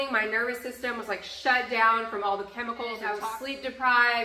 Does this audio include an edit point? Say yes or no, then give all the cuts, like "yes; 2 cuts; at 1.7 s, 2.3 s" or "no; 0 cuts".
yes; 1 cut; at 3.2 s